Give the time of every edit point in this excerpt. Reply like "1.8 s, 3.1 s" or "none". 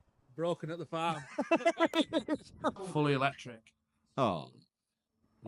2.8 s

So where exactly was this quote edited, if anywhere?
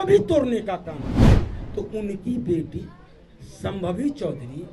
none

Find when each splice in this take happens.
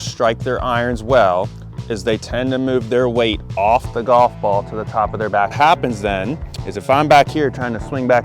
5.5 s

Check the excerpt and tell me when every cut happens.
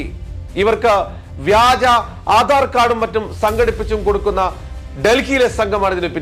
none

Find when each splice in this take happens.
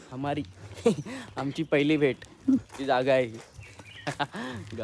none

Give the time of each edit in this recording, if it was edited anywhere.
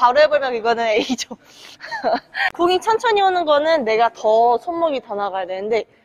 2.4 s

